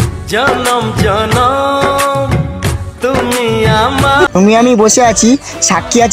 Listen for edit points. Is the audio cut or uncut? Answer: cut